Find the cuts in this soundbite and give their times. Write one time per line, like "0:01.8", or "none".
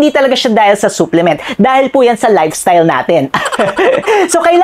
none